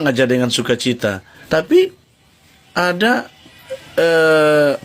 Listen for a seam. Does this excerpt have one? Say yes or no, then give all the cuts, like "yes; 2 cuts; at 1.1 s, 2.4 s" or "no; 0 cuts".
yes; 1 cut; at 1.3 s